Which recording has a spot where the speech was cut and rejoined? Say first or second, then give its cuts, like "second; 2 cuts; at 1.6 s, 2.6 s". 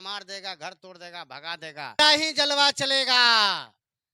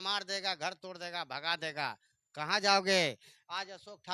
first; 1 cut; at 2.0 s